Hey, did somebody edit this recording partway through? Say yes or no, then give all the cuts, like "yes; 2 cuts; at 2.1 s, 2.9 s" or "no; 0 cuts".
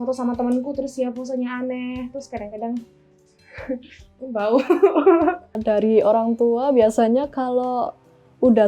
yes; 1 cut; at 5.5 s